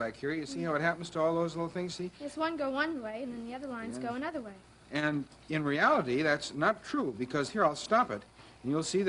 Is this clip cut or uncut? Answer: uncut